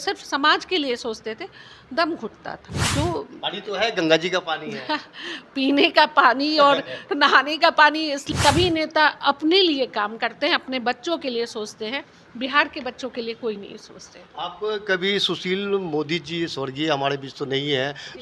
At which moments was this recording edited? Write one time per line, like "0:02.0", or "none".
0:02.7
0:08.2